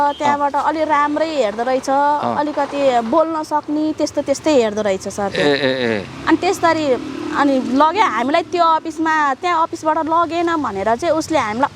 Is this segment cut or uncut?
uncut